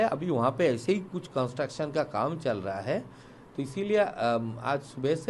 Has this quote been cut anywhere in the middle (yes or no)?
no